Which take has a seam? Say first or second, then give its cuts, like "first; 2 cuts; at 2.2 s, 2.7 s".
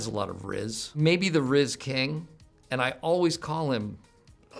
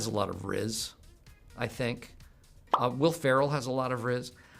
first; 1 cut; at 0.9 s